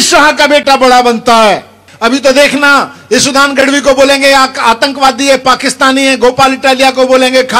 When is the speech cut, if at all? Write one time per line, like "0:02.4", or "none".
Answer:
0:01.8